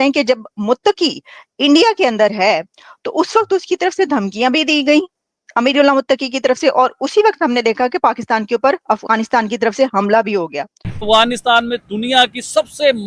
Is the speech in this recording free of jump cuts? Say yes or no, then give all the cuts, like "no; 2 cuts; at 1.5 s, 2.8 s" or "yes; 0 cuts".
no; 1 cut; at 11.0 s